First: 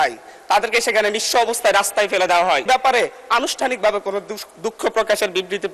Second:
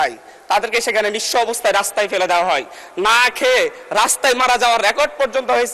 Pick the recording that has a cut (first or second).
first